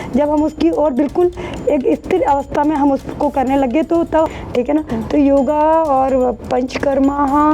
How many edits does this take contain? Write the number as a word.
one